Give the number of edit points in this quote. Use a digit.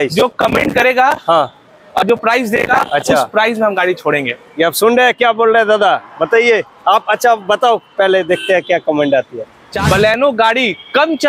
1